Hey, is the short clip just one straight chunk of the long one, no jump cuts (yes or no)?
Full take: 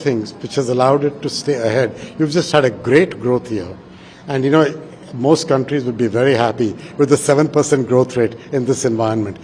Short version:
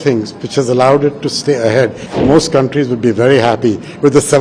no